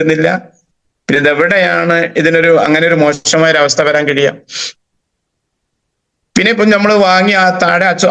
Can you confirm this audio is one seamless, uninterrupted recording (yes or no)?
yes